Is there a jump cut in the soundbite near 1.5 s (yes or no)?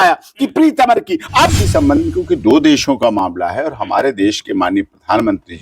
yes